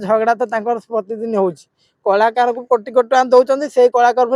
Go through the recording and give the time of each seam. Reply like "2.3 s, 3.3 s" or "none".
none